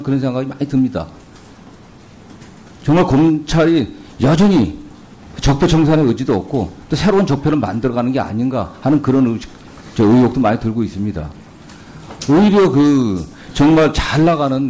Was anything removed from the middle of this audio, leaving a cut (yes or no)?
yes